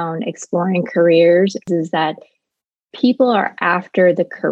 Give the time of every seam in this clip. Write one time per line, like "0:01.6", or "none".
0:01.7